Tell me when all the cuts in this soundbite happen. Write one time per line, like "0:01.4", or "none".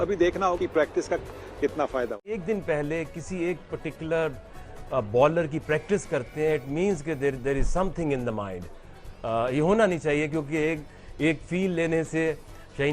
0:02.3